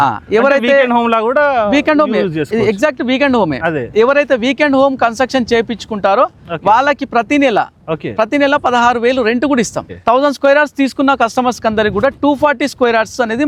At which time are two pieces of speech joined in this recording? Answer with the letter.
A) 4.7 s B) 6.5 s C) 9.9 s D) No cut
C